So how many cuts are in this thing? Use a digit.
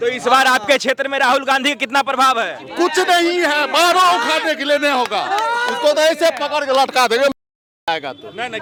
0